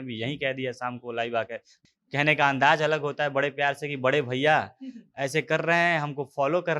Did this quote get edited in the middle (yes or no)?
yes